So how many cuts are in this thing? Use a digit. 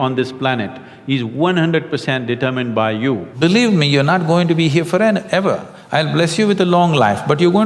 1